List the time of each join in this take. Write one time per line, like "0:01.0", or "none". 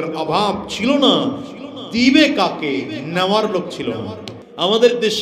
0:04.2